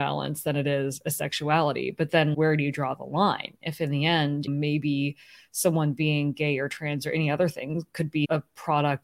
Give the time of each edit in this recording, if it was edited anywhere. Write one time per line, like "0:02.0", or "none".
0:02.3
0:08.3